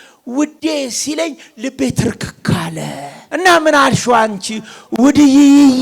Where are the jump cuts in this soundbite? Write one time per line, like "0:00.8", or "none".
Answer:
0:03.1